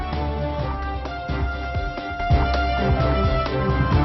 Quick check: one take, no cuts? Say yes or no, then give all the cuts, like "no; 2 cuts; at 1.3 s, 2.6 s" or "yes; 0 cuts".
no; 1 cut; at 2.2 s